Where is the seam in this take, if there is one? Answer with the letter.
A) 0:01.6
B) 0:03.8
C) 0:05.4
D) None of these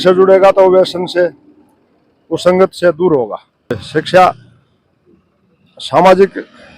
B